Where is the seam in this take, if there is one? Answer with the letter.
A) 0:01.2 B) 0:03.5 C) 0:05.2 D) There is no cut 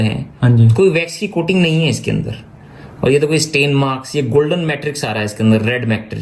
D